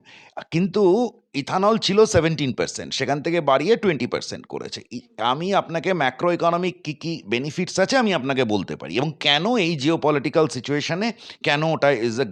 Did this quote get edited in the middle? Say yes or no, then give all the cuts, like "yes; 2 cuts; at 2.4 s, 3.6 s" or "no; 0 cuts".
no; 0 cuts